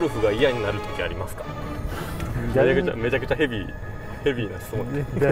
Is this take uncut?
no; 1 cut; at 1.6 s

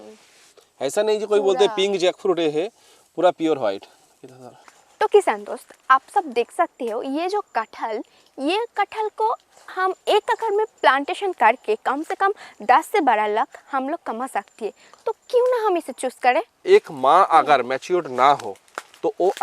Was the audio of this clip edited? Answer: yes; 2 cuts; at 4.8 s, 16.6 s

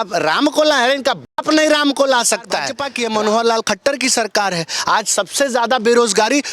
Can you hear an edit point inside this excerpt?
yes; 1 cut; at 2.8 s

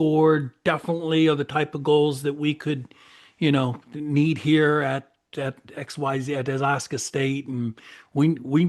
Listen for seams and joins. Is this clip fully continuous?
yes; 0 cuts

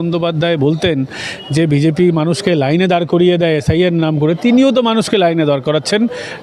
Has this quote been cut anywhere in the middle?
no; 0 cuts

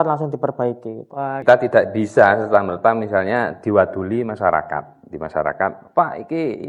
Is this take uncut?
no; 1 cut; at 1.4 s

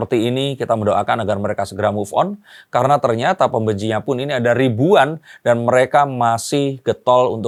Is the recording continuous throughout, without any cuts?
yes; 0 cuts

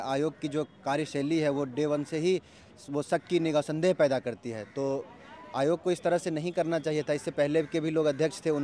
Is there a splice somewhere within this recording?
no; 0 cuts

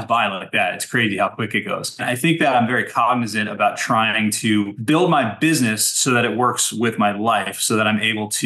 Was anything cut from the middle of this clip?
yes; 2 cuts; at 2.0 s, 4.8 s

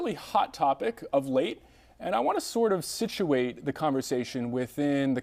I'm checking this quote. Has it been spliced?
no; 0 cuts

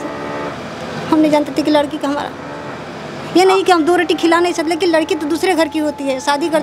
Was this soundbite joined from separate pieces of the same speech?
no; 0 cuts

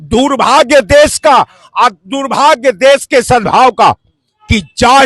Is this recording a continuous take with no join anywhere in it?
yes; 0 cuts

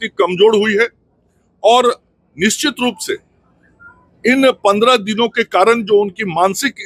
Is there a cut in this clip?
no; 0 cuts

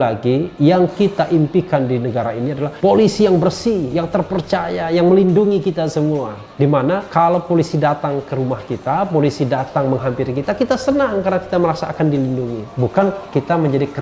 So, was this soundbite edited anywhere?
yes; 3 cuts; at 2.7 s, 6.8 s, 12.6 s

